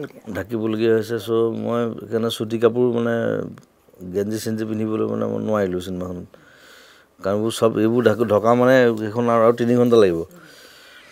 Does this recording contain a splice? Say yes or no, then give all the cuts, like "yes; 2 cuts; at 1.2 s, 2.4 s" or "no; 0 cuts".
no; 0 cuts